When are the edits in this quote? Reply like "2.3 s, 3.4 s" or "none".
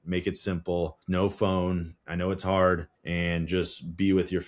1.0 s, 3.0 s